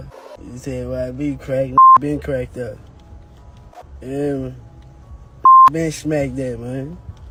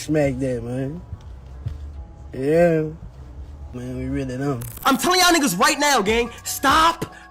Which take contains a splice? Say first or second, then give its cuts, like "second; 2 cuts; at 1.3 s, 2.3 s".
second; 1 cut; at 4.7 s